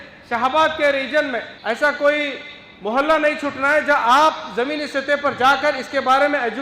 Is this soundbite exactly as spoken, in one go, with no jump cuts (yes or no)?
no